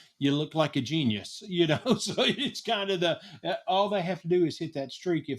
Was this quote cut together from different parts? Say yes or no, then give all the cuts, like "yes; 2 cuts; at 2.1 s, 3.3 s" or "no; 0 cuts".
no; 0 cuts